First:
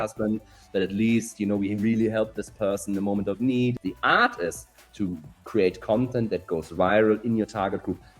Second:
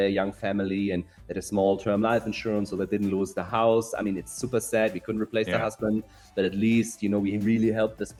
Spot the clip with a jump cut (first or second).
first